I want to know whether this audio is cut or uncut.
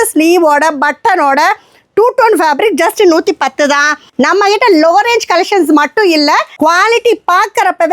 cut